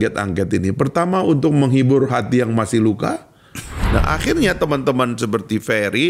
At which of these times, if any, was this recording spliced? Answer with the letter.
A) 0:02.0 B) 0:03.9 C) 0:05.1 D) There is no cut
B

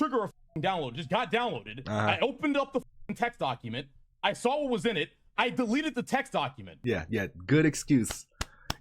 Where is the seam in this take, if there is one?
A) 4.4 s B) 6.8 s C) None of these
B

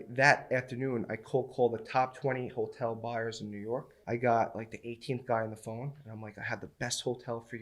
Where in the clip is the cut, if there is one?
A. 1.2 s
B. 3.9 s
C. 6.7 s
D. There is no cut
B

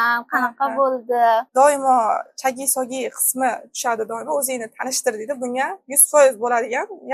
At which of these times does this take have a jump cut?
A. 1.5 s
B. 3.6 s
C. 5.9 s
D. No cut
A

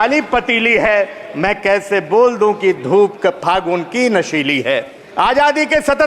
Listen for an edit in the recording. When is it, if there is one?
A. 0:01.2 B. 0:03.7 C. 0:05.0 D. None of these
C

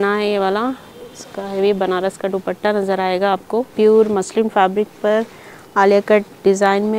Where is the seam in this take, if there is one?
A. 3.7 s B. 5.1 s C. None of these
A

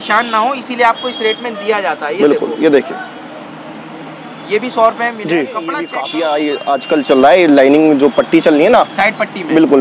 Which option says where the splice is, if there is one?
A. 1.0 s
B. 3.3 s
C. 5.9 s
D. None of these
C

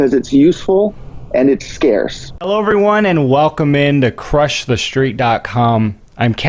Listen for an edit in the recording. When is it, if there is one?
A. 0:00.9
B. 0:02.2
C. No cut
B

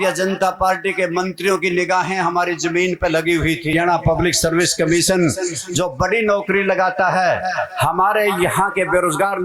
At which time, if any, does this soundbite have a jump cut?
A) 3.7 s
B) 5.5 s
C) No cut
A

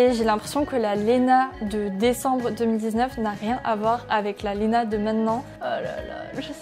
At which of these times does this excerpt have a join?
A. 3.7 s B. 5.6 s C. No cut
B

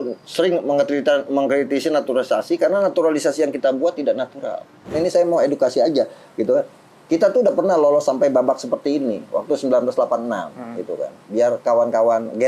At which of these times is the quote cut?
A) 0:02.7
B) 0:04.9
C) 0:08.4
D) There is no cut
B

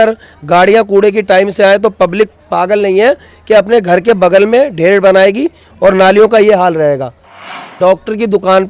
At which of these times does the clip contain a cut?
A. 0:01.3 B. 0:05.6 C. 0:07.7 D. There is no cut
C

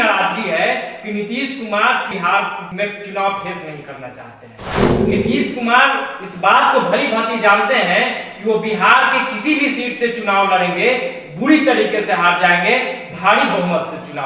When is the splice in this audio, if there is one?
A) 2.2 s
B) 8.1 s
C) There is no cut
A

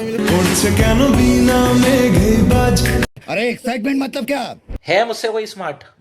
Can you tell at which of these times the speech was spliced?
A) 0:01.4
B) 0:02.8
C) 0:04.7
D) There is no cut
C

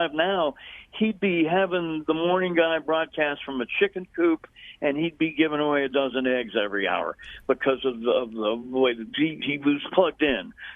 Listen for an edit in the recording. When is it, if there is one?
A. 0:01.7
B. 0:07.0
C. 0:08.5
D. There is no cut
D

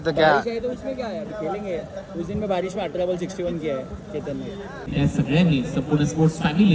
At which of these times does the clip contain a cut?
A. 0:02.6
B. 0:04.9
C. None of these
B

